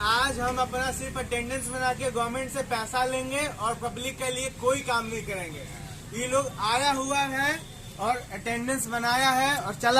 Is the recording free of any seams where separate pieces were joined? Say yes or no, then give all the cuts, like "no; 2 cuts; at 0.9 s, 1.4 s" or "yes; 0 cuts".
yes; 0 cuts